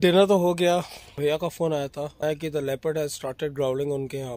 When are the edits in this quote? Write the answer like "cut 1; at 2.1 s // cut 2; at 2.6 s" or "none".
cut 1; at 1.1 s // cut 2; at 2.2 s